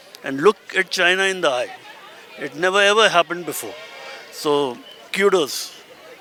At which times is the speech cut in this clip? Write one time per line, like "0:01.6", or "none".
none